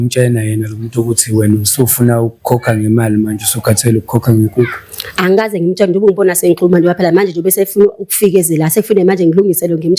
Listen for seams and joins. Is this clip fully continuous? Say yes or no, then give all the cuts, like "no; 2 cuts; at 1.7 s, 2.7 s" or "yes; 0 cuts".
yes; 0 cuts